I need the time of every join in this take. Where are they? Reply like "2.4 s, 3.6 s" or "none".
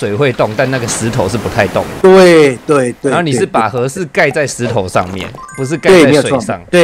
none